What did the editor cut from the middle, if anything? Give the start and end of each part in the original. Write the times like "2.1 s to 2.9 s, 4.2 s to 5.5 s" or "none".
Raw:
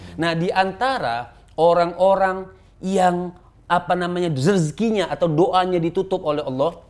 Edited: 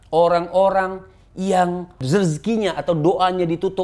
3.5 s to 4.4 s